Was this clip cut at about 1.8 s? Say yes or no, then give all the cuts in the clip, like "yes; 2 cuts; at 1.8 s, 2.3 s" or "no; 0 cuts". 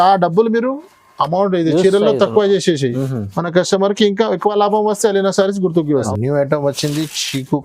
no; 1 cut; at 6.1 s